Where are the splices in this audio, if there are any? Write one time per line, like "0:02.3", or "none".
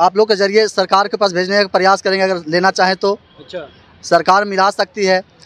none